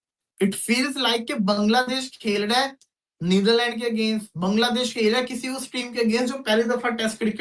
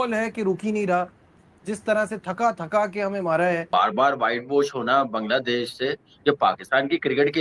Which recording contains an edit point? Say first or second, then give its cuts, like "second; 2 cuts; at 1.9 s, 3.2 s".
second; 2 cuts; at 1.4 s, 3.7 s